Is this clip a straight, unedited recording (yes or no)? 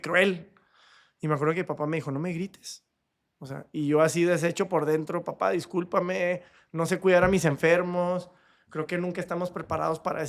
yes